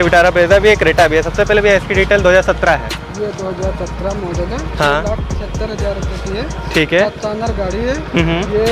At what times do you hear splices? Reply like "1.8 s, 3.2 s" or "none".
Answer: none